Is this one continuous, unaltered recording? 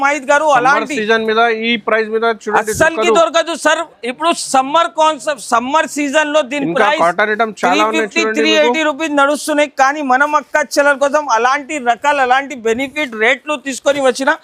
yes; 0 cuts

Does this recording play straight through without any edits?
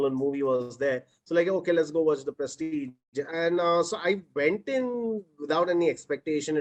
yes; 0 cuts

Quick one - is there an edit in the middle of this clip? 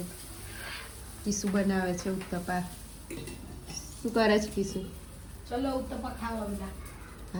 no; 0 cuts

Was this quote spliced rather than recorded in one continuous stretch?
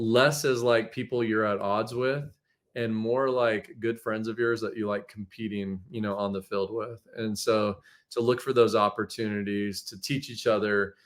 no; 0 cuts

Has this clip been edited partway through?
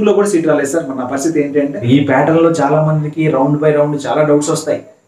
yes; 1 cut; at 1.8 s

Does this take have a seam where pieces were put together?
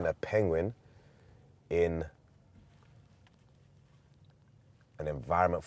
no; 0 cuts

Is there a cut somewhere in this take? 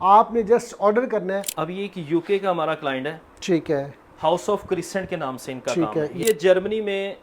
yes; 2 cuts; at 1.5 s, 6.2 s

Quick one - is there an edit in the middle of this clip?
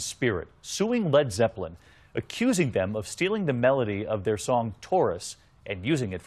yes; 1 cut; at 2.3 s

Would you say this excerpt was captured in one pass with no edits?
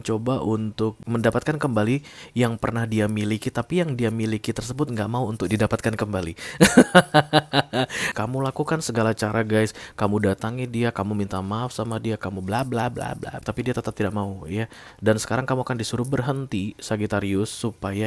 no; 3 cuts; at 1.0 s, 8.1 s, 13.4 s

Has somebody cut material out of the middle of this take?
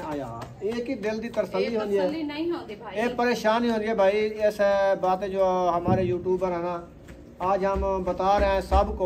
no; 0 cuts

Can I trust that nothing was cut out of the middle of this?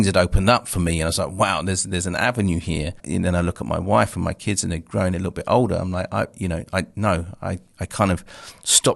no; 1 cut; at 3.0 s

